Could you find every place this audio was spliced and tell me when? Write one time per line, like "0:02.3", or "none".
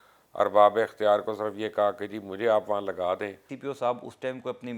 0:03.5